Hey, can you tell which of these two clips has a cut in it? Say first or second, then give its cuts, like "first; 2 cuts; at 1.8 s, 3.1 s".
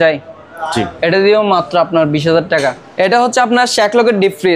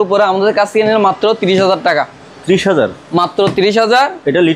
first; 1 cut; at 2.8 s